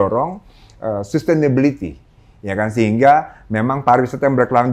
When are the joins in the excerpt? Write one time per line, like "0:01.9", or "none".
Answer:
none